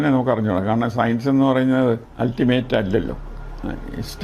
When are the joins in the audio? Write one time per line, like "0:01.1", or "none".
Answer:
0:02.1

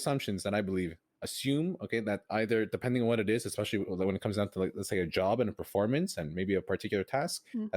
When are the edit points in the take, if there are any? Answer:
0:01.1

